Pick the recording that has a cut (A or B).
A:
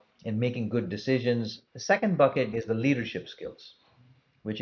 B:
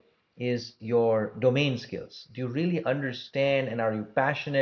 A